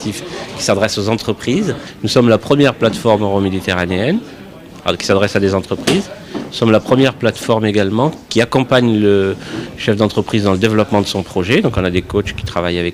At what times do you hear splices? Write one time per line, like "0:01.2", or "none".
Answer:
none